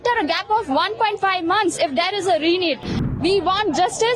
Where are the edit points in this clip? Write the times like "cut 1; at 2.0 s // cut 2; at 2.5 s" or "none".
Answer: cut 1; at 3.1 s